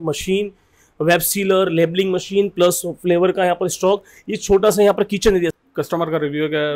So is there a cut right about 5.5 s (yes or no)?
yes